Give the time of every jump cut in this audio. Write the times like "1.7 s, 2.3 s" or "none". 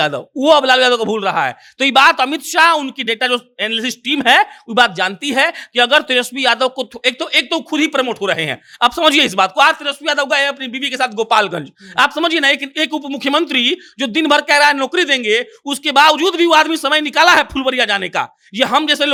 none